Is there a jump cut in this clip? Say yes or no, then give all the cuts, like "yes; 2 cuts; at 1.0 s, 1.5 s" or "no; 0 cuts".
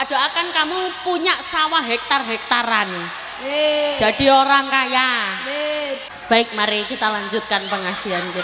yes; 1 cut; at 6.1 s